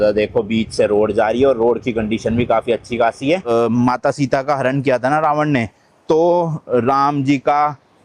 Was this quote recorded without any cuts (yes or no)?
no